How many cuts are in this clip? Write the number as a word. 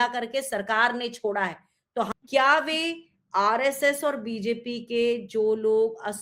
one